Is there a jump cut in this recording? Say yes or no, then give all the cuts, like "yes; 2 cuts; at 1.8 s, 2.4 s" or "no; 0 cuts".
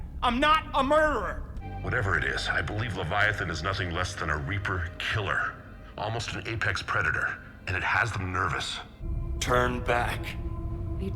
yes; 2 cuts; at 1.7 s, 9.0 s